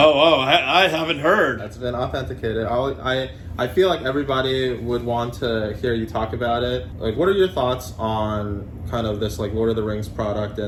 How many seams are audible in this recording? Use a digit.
0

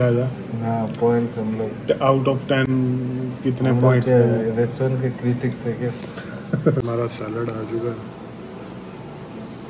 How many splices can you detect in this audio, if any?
0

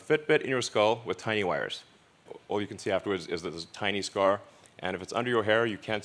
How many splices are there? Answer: 0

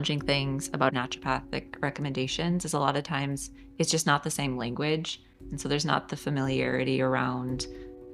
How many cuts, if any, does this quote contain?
1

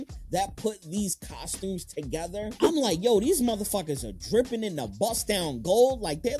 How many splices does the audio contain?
1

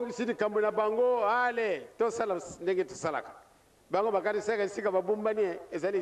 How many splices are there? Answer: 0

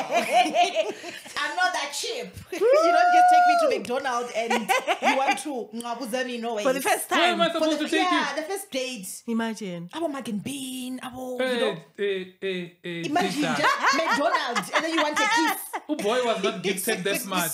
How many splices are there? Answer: 0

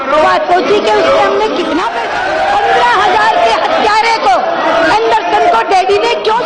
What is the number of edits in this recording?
1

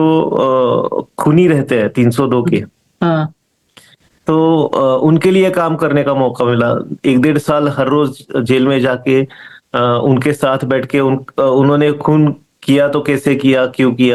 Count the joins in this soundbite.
0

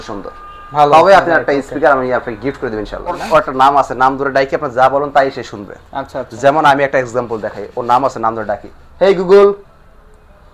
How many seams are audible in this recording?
1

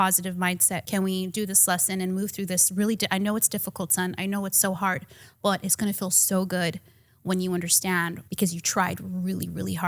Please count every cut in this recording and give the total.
2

